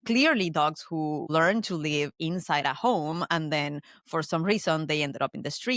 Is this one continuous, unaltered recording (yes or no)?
no